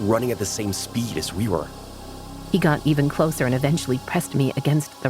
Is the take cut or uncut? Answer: cut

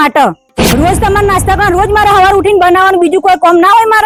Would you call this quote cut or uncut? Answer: uncut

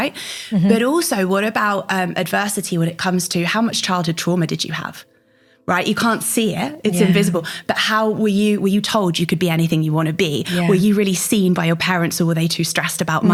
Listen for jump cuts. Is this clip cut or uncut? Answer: uncut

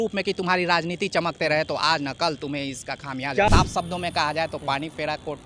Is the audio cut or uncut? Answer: cut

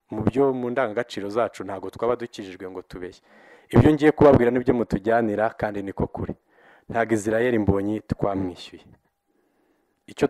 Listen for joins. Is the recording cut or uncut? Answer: uncut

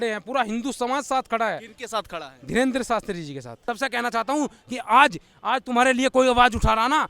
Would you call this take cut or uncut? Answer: cut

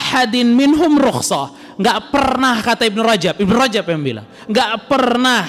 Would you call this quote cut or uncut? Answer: uncut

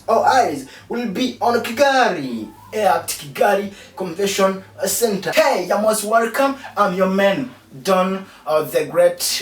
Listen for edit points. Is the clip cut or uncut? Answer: cut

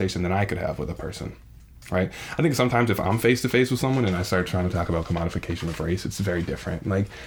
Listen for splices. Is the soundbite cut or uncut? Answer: uncut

